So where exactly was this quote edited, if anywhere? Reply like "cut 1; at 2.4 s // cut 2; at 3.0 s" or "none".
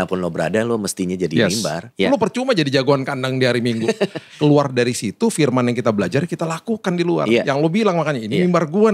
cut 1; at 1.8 s // cut 2; at 4.2 s

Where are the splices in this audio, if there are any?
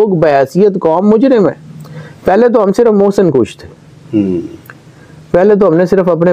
none

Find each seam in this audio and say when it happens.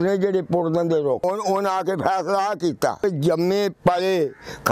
cut 1; at 1.2 s // cut 2; at 3.0 s

